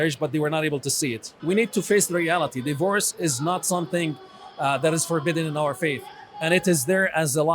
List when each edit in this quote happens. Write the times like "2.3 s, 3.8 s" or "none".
1.3 s